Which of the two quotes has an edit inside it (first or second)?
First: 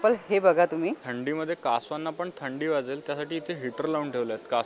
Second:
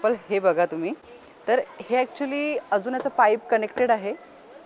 first